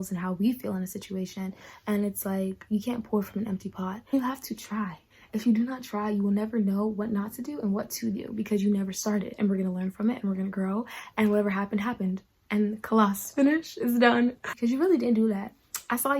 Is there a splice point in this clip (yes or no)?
yes